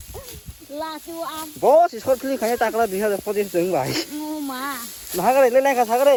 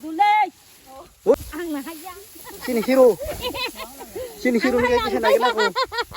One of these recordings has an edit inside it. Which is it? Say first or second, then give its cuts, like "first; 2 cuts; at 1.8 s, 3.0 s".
second; 1 cut; at 1.5 s